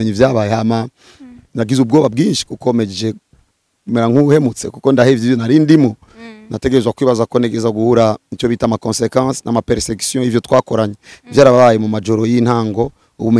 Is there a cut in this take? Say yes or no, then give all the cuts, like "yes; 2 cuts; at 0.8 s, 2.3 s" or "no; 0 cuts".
no; 0 cuts